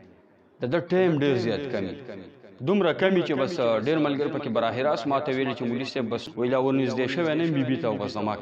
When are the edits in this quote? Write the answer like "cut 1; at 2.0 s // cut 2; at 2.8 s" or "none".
cut 1; at 6.2 s